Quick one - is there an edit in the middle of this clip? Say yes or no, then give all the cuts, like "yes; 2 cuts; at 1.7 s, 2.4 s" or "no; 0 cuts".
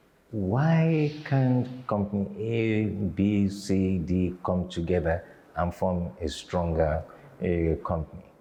no; 0 cuts